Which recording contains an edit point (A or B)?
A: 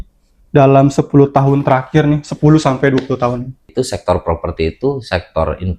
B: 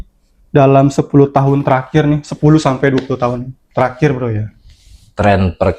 A